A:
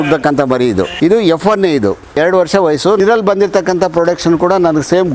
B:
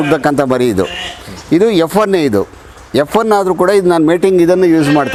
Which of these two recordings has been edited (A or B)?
A